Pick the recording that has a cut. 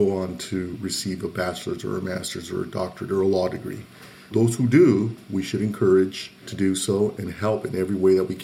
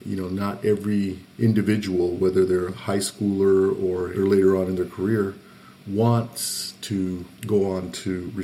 second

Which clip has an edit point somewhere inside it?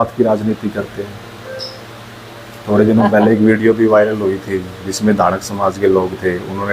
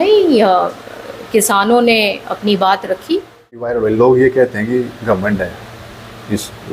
second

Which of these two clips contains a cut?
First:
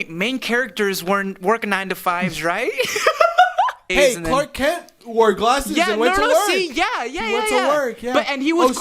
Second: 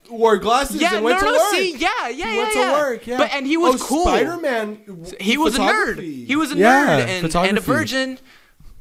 first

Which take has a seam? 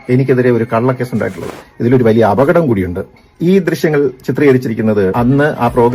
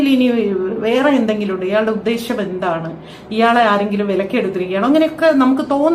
first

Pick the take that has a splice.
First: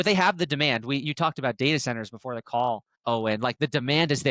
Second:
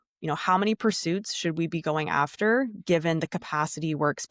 first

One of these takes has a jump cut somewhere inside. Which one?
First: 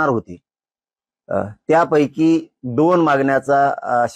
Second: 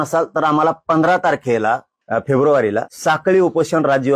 second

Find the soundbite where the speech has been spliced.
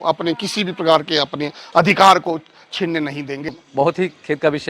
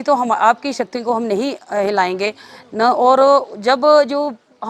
first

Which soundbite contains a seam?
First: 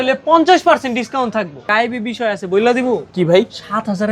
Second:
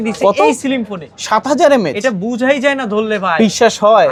first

